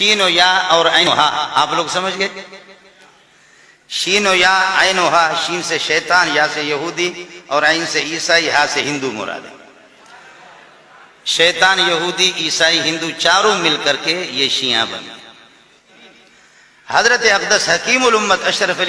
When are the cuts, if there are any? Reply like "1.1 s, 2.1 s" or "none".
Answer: 1.0 s, 16.0 s